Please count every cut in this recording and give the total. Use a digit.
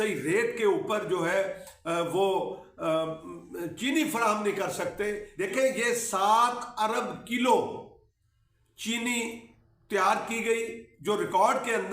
1